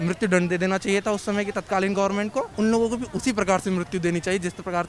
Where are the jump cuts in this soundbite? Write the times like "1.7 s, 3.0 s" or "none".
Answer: 2.5 s